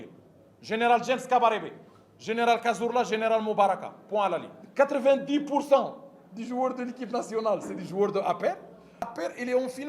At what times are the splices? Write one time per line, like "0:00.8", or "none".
0:04.6
0:09.1